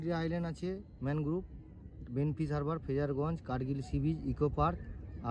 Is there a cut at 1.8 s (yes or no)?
no